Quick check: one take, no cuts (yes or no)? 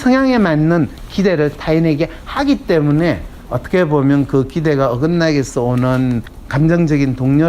no